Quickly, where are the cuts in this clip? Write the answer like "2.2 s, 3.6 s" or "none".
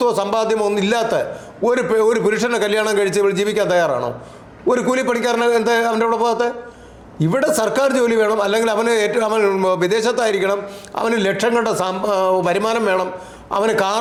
none

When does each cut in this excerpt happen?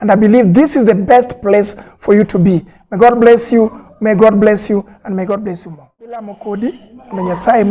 6.1 s

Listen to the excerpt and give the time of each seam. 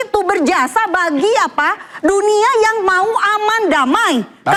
none

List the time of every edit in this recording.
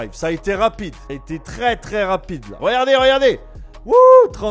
none

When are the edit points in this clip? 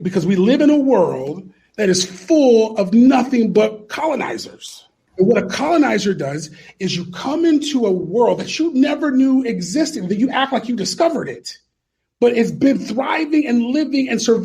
5.1 s

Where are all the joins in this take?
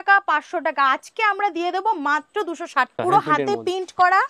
2.9 s

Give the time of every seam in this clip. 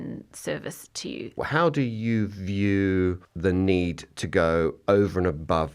1.4 s, 3.3 s

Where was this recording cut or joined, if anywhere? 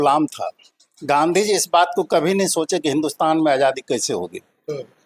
none

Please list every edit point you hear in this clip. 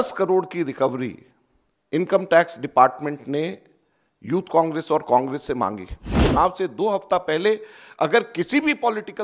6.2 s

